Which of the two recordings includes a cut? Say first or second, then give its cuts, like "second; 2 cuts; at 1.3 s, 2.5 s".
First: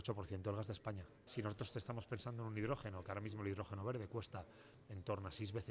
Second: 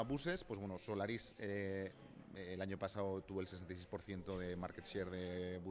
first; 1 cut; at 1.2 s